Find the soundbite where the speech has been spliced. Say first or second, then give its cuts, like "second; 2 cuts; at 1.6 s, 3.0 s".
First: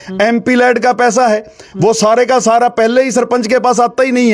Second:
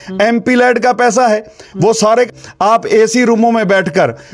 second; 1 cut; at 2.3 s